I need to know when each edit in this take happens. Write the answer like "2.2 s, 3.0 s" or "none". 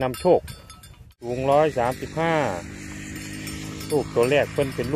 1.2 s